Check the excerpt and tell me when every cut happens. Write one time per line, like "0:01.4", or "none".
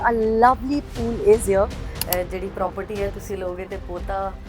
0:01.9